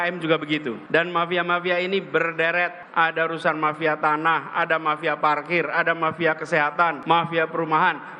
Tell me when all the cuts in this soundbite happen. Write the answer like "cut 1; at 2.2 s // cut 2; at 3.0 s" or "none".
cut 1; at 1.0 s // cut 2; at 2.8 s // cut 3; at 7.0 s